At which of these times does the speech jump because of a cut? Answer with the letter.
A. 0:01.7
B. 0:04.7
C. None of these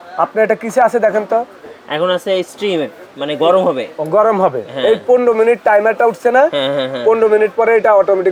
C